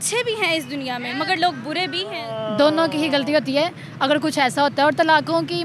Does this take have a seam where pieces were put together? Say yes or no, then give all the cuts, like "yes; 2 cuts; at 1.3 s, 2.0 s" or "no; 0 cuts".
yes; 1 cut; at 2.1 s